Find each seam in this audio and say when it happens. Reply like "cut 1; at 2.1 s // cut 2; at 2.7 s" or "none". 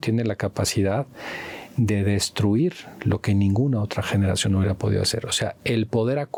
none